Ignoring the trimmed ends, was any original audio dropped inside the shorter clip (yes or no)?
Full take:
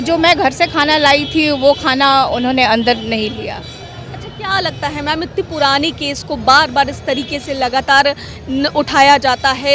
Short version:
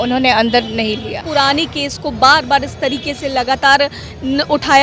yes